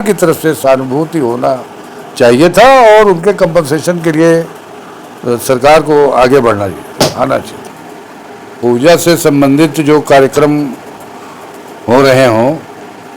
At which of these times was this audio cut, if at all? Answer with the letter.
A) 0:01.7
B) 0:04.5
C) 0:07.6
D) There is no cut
C